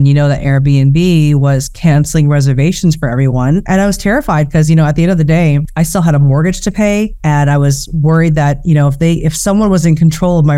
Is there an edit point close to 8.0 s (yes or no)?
no